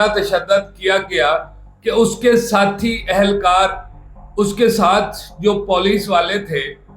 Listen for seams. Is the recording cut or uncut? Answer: uncut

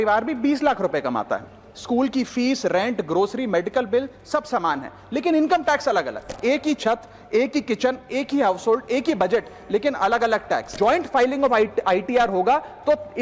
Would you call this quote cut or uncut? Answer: cut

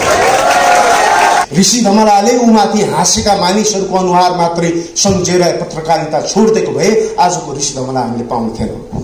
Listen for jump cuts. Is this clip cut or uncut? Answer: cut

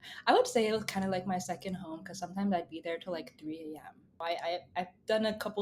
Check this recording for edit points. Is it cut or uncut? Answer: cut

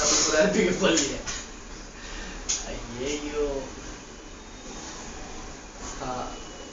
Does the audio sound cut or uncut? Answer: uncut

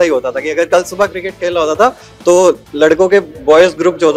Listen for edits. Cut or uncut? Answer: uncut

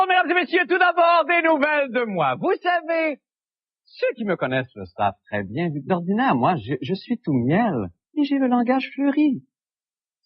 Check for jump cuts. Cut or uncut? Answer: cut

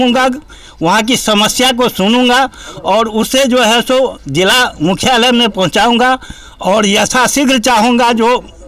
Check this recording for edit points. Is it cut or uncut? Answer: uncut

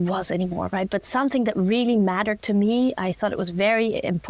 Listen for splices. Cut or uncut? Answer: uncut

